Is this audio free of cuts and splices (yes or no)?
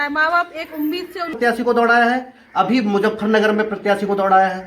no